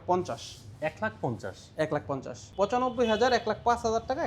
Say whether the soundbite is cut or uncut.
cut